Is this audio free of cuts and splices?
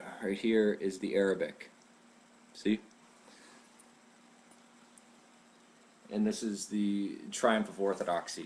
yes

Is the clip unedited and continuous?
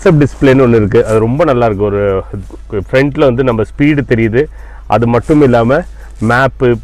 yes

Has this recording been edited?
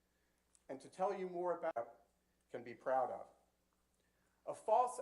yes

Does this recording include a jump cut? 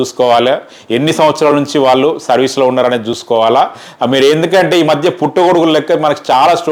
no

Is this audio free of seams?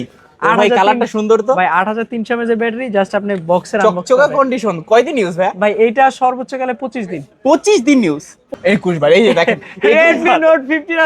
no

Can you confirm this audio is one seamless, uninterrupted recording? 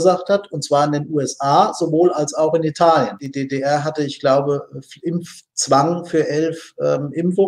no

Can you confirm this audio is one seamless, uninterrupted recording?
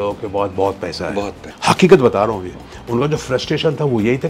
no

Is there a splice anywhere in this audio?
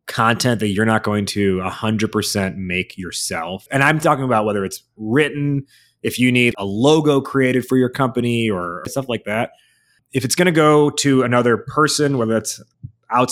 yes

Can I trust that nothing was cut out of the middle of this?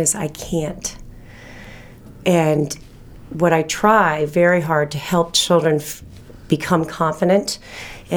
yes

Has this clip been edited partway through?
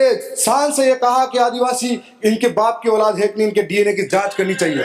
no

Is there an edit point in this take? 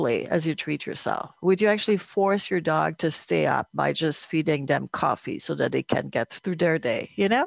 yes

